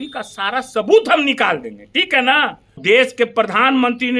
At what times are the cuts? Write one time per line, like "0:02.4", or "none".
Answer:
0:02.8